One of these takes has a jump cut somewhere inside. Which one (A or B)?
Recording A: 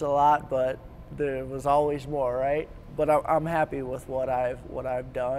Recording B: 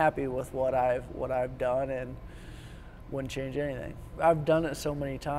B